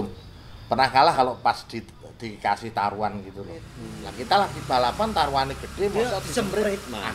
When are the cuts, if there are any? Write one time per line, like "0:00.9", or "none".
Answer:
0:03.2